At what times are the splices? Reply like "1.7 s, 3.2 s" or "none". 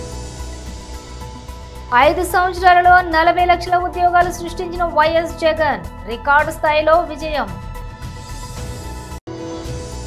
1.0 s, 1.8 s